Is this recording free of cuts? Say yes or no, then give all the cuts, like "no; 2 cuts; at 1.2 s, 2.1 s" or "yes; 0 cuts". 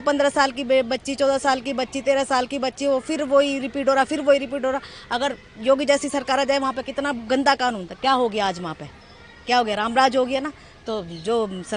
yes; 0 cuts